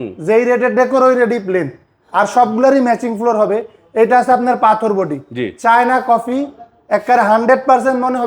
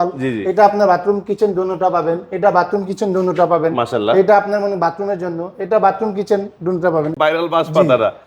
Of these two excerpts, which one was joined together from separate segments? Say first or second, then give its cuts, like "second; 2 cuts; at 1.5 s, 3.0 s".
second; 1 cut; at 7.1 s